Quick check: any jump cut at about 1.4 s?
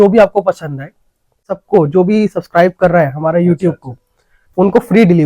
yes; 1 cut; at 1.4 s

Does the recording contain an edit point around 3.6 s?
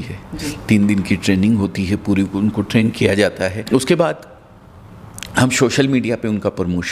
yes; 1 cut; at 3.6 s

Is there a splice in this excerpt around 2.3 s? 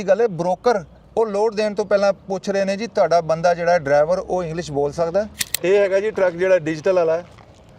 no; 2 cuts; at 1.0 s, 5.4 s

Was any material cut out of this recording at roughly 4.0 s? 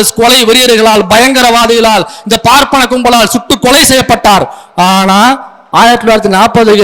no; 1 cut; at 5.5 s

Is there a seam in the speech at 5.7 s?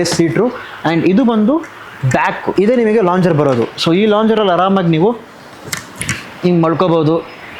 no; 0 cuts

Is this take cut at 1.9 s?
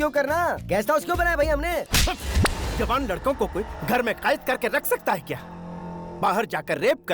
yes; 1 cut; at 1.9 s

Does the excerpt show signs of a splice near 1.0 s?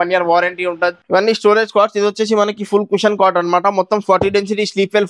yes; 1 cut; at 1.0 s

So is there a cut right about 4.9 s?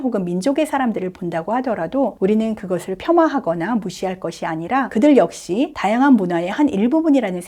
yes; 3 cuts; at 2.1 s, 4.9 s, 5.8 s

